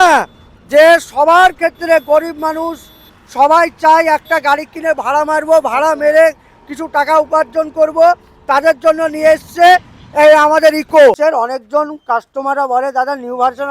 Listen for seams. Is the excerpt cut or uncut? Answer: cut